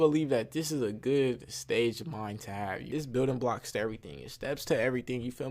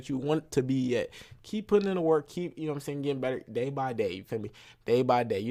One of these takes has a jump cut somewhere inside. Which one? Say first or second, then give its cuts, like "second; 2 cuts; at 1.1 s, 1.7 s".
first; 1 cut; at 2.9 s